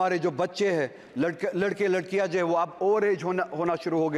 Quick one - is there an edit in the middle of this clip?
no; 0 cuts

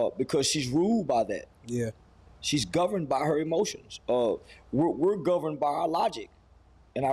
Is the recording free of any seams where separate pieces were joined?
yes; 0 cuts

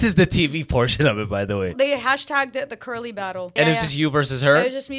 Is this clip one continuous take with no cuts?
no; 2 cuts; at 1.7 s, 3.5 s

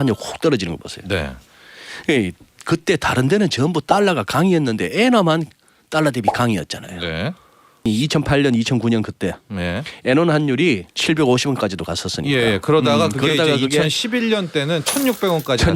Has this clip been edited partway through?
yes; 2 cuts; at 7.9 s, 10.9 s

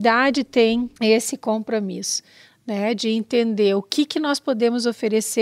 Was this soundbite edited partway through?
yes; 1 cut; at 0.9 s

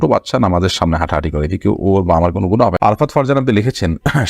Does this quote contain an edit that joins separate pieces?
yes; 1 cut; at 2.8 s

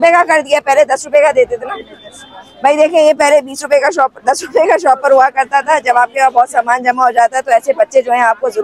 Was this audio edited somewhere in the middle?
no; 0 cuts

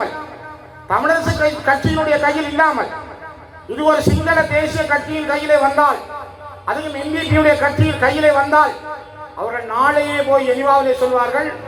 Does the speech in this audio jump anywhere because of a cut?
no; 0 cuts

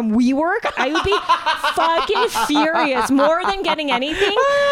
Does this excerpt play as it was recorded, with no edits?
yes; 0 cuts

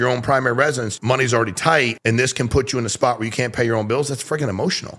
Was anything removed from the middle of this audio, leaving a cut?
yes; 2 cuts; at 0.9 s, 2.0 s

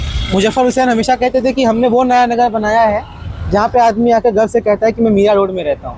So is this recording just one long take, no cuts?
yes; 0 cuts

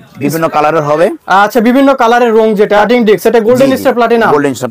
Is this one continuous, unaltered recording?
no; 1 cut; at 2.8 s

